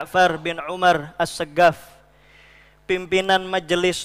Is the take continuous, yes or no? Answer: yes